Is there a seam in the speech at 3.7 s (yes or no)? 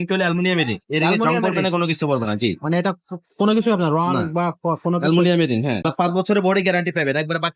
no